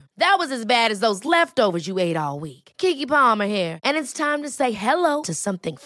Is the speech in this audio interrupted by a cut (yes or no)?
no